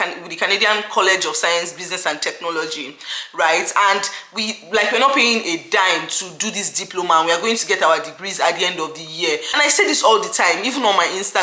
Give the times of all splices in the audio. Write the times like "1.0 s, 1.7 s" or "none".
9.5 s